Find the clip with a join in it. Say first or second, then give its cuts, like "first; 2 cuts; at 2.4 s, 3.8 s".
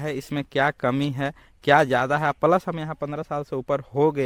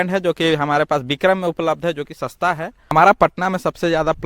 second; 1 cut; at 2.7 s